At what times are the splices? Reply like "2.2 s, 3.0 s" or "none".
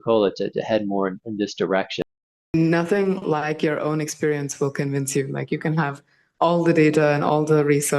2.4 s